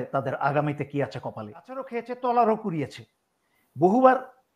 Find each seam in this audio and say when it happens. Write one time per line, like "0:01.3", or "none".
0:01.9